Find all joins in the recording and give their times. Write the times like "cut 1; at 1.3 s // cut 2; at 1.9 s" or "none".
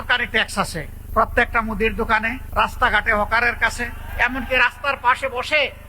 cut 1; at 1.0 s // cut 2; at 2.4 s // cut 3; at 4.0 s